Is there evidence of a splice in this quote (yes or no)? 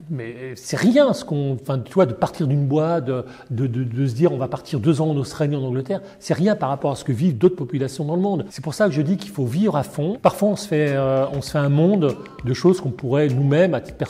yes